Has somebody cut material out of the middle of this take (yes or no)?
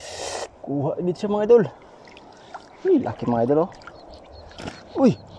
no